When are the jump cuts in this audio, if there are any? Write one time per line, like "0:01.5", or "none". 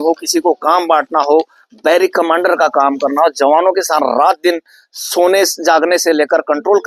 none